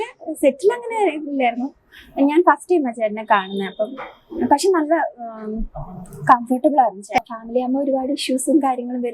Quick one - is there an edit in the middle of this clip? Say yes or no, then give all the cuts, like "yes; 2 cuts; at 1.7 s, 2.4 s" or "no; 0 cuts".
yes; 1 cut; at 7.2 s